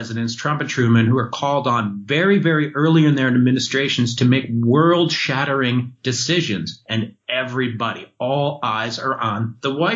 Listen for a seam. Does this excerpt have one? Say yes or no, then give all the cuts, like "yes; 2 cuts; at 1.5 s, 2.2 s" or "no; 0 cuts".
no; 0 cuts